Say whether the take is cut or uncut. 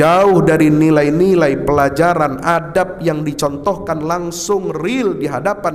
uncut